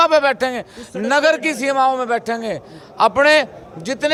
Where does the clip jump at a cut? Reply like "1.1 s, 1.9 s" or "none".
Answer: none